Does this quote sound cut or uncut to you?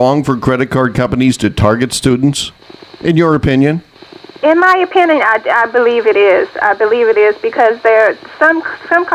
uncut